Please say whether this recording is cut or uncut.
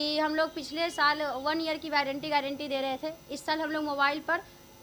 uncut